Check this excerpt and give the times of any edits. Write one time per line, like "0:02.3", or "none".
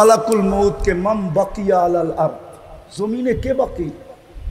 none